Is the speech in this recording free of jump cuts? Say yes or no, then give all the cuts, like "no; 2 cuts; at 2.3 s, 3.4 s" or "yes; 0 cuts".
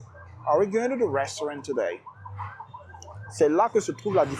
yes; 0 cuts